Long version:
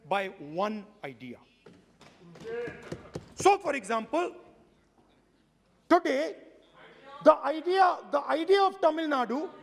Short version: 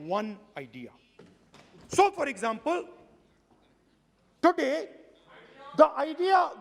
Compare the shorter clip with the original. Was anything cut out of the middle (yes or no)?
yes